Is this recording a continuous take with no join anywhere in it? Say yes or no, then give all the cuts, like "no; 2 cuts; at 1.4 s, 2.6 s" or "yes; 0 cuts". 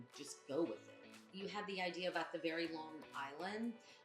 no; 1 cut; at 1.2 s